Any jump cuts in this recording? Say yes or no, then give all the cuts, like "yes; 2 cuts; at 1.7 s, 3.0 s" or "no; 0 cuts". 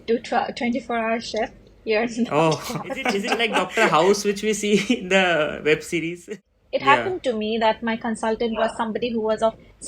yes; 2 cuts; at 3.5 s, 6.4 s